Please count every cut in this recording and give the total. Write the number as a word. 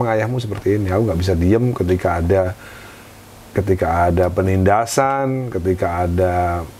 zero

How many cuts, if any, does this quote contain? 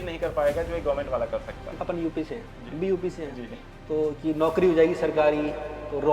one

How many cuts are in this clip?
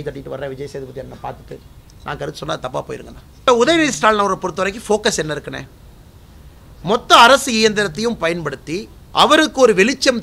two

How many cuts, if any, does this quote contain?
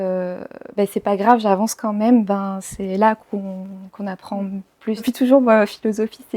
one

